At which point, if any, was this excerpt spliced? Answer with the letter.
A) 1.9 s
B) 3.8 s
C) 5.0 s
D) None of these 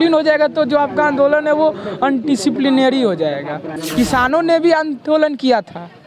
B